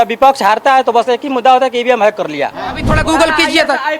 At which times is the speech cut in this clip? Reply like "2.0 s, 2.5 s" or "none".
2.9 s